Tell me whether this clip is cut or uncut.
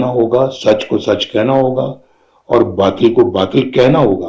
uncut